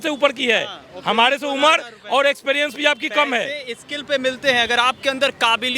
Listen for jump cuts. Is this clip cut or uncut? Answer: uncut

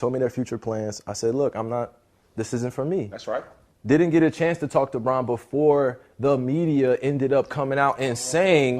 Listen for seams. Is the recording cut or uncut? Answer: cut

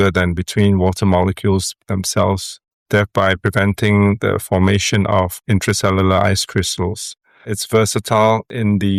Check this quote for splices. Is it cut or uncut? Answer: uncut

